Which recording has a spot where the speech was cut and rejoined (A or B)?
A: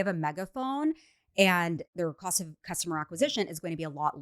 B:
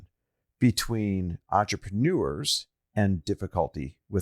A